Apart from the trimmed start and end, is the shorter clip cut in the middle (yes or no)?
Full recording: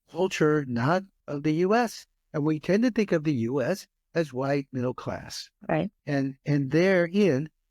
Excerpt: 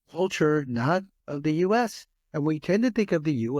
no